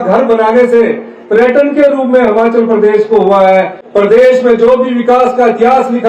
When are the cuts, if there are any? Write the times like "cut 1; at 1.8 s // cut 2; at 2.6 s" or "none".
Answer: cut 1; at 3.8 s